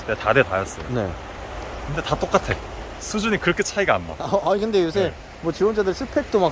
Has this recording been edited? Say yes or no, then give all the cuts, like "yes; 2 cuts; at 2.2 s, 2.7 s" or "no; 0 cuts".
no; 0 cuts